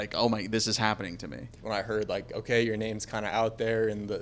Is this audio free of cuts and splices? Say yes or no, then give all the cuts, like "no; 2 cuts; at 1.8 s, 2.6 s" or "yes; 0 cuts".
no; 1 cut; at 1.5 s